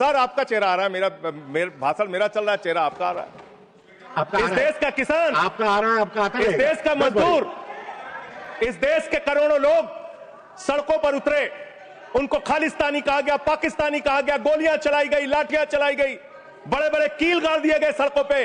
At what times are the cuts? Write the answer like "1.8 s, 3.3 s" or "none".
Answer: none

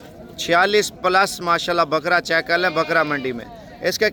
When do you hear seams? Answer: none

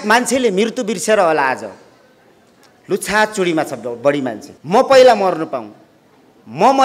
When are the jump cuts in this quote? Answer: 4.5 s

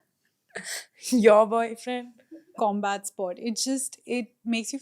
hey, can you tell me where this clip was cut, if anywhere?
2.5 s

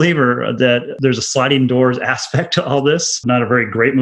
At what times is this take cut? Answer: 0.9 s, 3.2 s

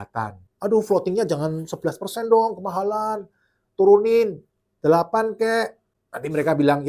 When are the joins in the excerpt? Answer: none

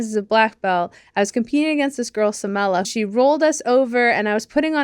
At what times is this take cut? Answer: 2.9 s

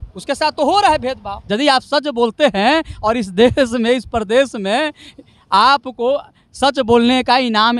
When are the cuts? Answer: 1.3 s

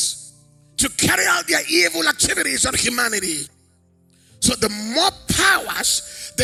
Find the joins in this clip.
none

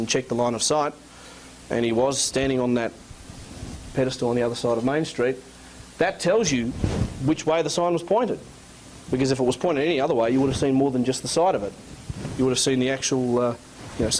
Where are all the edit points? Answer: 9.1 s

